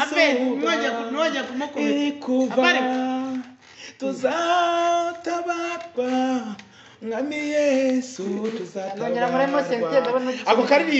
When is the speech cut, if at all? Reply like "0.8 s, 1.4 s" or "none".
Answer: none

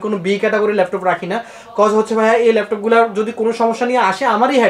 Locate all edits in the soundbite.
none

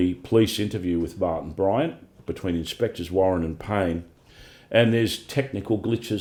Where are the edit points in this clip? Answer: none

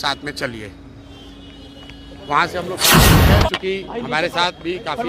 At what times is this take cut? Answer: 2.7 s, 3.6 s

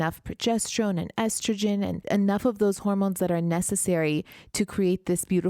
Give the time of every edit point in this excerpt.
2.0 s

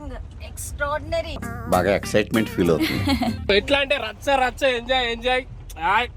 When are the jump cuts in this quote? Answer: 0.9 s, 3.5 s

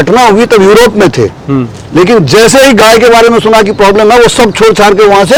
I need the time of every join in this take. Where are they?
none

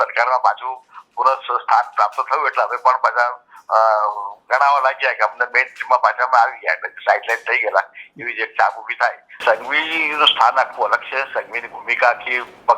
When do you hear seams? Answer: 9.4 s

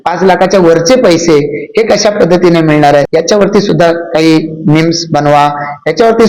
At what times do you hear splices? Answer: 3.1 s

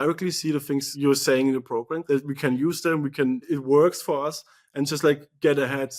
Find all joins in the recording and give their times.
0.9 s, 2.0 s, 3.5 s

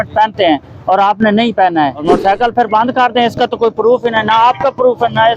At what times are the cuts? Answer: 2.0 s

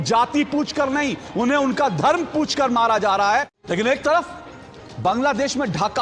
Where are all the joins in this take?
3.5 s

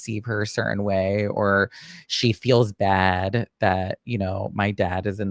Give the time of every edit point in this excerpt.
none

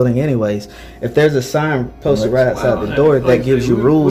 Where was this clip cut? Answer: none

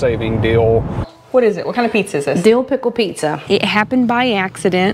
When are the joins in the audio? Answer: 1.1 s, 3.4 s

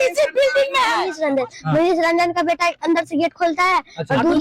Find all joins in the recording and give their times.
1.1 s

